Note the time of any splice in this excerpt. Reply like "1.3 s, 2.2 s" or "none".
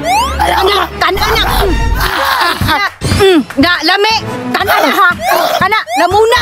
none